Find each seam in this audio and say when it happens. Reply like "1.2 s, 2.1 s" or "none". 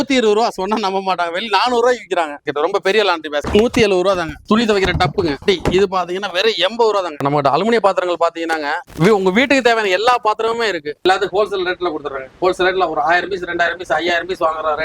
2.4 s, 4.4 s, 7.1 s, 11.0 s